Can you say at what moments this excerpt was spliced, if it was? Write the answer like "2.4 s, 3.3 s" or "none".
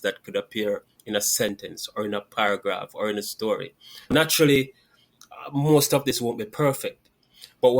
4.1 s